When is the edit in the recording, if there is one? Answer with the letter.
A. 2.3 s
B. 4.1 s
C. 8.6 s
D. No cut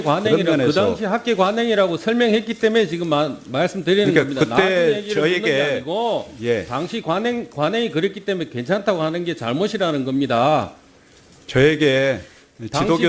A